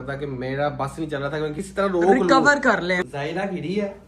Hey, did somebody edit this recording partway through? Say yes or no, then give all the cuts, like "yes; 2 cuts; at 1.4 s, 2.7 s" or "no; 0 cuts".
yes; 2 cuts; at 1.6 s, 3.0 s